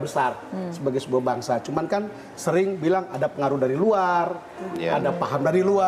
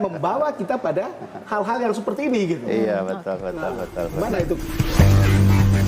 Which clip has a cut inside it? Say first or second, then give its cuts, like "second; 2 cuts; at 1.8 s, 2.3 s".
second; 1 cut; at 4.6 s